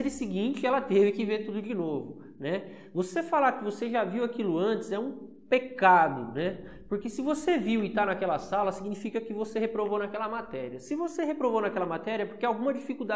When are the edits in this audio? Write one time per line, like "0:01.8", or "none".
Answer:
none